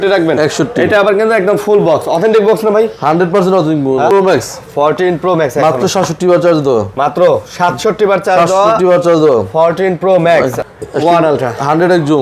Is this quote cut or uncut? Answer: cut